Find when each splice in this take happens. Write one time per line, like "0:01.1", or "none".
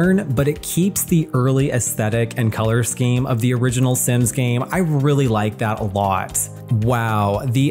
0:06.5